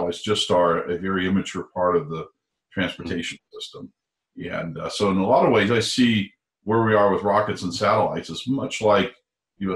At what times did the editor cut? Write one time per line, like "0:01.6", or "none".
none

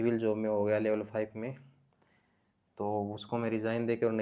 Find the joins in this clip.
none

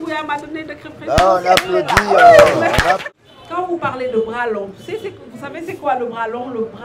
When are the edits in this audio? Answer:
0:03.0

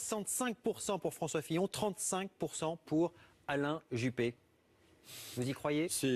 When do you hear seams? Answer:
none

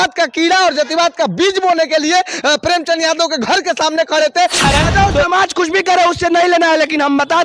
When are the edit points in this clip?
0:04.6

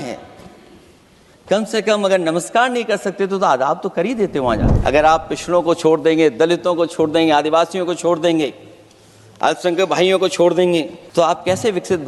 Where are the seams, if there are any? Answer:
0:04.7
0:11.0

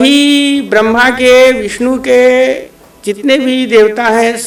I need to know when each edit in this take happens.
none

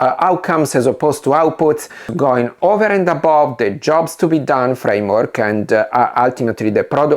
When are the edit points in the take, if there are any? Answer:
0:02.1

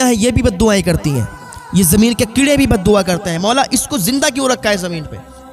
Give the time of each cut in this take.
none

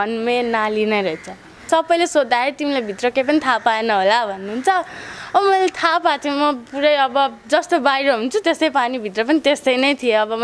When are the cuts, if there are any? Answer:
0:01.6

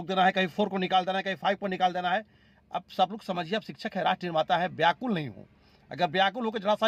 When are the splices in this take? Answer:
none

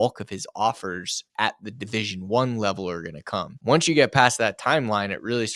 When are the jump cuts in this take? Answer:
0:03.5

